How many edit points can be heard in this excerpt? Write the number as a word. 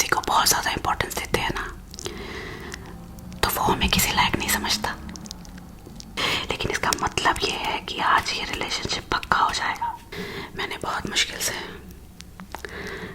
three